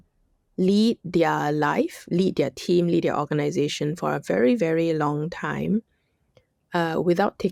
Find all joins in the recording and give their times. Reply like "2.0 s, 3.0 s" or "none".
none